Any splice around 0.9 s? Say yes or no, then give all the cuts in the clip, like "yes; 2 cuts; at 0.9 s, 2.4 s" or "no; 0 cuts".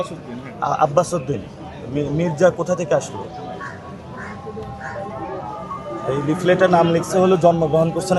no; 0 cuts